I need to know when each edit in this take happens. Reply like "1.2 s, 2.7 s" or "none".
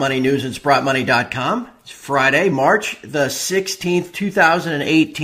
none